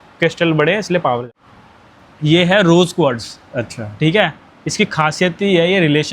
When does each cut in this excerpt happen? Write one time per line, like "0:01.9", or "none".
0:01.3